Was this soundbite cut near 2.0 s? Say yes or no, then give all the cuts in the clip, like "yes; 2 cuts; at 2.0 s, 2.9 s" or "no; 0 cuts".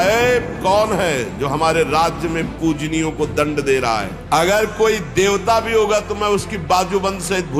no; 1 cut; at 4.1 s